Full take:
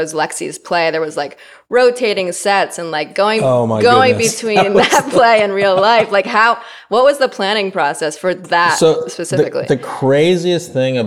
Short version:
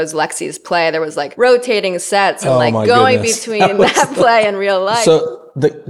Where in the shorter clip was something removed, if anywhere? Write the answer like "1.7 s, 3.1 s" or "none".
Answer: 1.3 s, 2.4 s, 5.0 s